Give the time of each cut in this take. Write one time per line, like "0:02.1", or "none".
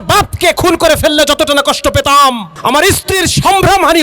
0:02.5